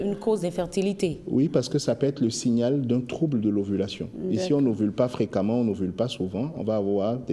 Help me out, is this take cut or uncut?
uncut